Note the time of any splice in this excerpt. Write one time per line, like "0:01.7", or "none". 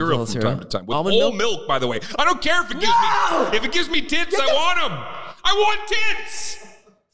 none